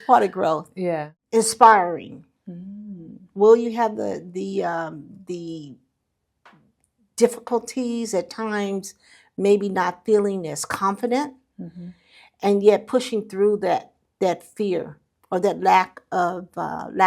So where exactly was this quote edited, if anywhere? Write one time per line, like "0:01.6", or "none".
0:01.1